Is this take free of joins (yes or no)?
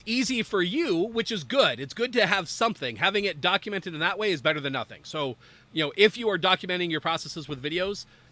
yes